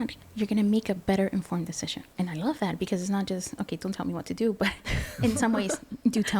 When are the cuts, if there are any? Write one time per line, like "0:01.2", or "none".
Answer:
0:02.1